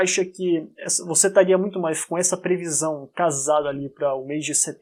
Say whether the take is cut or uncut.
uncut